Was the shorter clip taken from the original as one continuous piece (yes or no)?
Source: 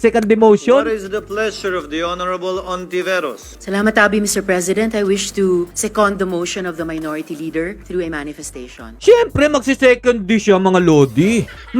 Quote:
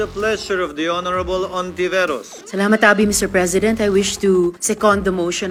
yes